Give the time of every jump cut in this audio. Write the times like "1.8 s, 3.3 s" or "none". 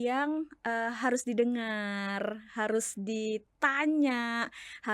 none